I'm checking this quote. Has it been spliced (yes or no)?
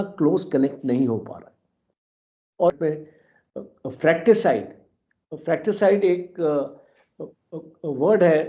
yes